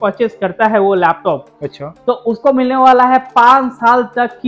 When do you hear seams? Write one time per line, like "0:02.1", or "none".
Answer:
none